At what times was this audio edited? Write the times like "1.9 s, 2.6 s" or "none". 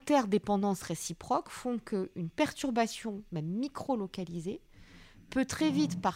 none